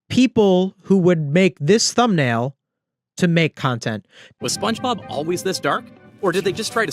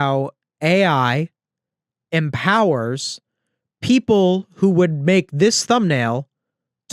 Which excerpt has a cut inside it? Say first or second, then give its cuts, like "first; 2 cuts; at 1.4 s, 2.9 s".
first; 1 cut; at 4.4 s